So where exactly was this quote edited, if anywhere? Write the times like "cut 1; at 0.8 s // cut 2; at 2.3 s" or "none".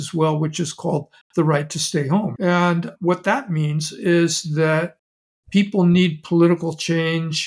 cut 1; at 2.3 s